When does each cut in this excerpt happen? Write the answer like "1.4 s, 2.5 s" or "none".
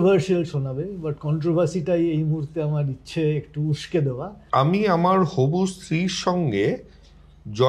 4.3 s

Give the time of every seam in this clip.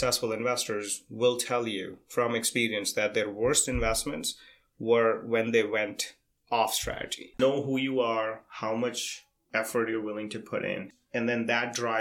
7.4 s, 10.9 s

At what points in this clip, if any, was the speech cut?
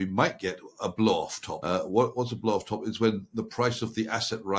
1.5 s

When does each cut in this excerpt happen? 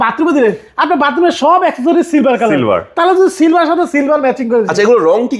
none

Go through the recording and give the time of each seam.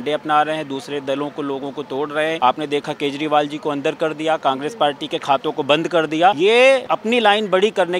2.4 s, 6.7 s

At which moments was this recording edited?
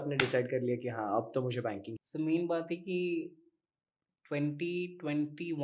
1.9 s

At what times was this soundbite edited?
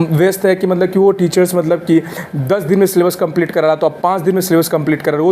none

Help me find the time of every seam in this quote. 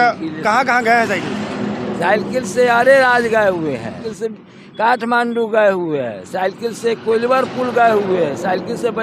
4.1 s

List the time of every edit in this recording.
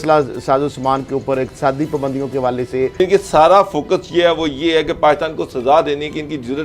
3.0 s

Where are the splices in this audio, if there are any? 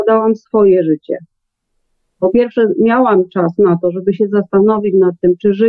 none

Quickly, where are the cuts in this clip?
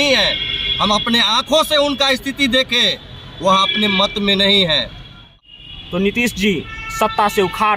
5.3 s

